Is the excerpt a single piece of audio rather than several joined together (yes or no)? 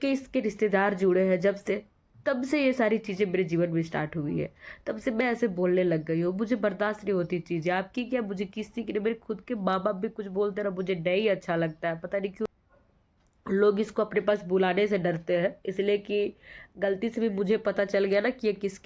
no